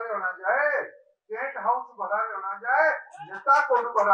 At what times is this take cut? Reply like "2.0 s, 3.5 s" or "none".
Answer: none